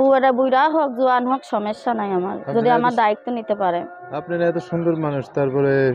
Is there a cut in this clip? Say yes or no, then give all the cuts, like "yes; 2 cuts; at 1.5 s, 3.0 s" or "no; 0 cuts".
no; 0 cuts